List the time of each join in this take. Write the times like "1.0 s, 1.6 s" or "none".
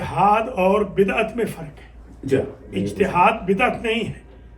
none